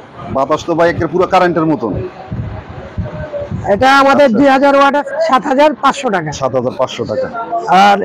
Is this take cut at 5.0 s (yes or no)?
yes